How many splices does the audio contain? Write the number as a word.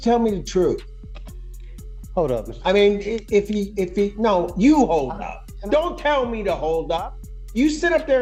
zero